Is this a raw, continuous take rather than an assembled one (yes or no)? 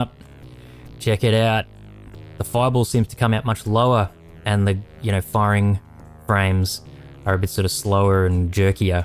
yes